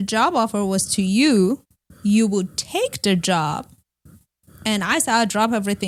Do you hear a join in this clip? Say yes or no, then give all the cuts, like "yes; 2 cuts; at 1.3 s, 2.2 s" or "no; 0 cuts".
no; 0 cuts